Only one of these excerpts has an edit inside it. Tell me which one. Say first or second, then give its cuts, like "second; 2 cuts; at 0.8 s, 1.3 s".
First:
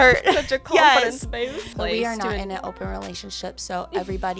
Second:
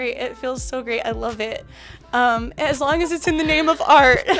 first; 1 cut; at 1.7 s